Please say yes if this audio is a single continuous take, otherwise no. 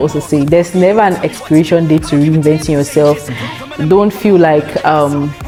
yes